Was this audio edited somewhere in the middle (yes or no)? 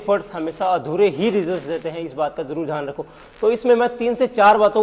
no